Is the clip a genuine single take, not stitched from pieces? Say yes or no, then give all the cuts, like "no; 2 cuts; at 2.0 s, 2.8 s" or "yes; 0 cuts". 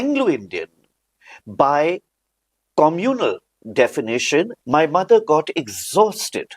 no; 1 cut; at 4.6 s